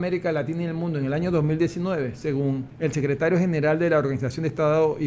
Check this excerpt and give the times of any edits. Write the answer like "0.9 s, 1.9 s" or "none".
2.7 s